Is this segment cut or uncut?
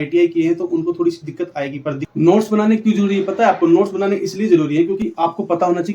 cut